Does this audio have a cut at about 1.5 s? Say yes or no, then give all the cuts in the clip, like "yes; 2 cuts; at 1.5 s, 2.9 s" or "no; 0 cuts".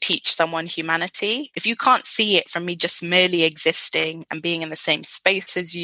yes; 1 cut; at 1.5 s